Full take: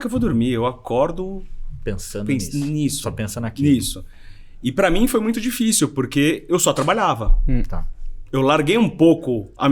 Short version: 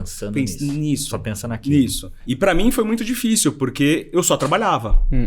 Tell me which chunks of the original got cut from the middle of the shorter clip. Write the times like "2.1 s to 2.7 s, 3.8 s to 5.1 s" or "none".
4.0 s to 4.4 s